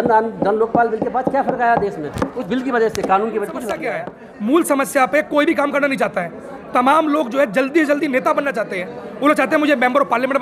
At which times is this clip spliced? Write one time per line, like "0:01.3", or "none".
0:03.9